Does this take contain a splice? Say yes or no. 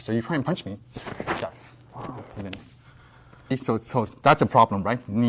yes